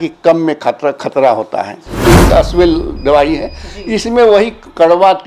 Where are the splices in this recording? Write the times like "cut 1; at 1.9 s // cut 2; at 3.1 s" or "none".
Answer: cut 1; at 2.1 s